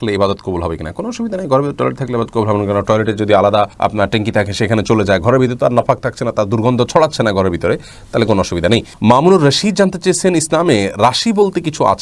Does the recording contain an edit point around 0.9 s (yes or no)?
no